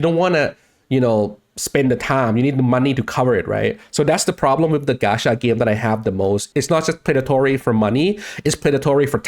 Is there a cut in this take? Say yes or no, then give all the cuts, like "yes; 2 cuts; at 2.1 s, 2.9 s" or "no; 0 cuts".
yes; 1 cut; at 6.5 s